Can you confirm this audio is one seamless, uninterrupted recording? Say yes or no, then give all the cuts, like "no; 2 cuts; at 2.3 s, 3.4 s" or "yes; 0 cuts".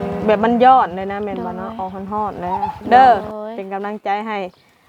no; 1 cut; at 2.8 s